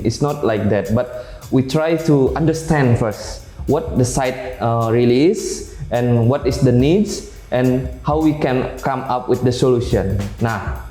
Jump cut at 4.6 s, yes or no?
no